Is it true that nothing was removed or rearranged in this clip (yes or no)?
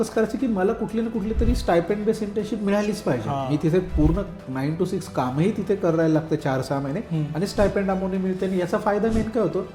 yes